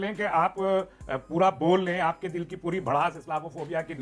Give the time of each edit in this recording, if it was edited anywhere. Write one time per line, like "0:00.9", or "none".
none